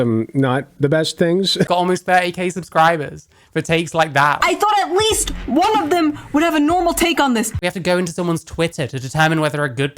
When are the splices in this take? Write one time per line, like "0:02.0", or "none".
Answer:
0:01.7
0:04.4
0:07.6